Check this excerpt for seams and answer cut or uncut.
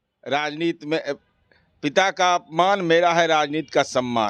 uncut